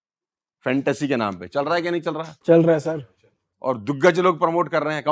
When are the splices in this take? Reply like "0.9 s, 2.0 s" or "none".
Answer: none